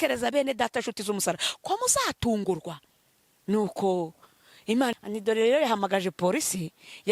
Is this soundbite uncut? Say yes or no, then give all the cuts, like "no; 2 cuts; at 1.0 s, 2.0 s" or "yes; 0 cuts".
no; 1 cut; at 4.9 s